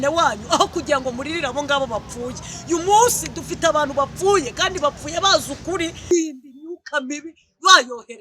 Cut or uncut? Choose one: cut